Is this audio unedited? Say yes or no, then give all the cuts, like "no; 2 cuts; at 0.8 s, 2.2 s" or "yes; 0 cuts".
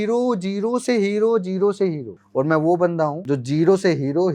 no; 2 cuts; at 2.1 s, 3.2 s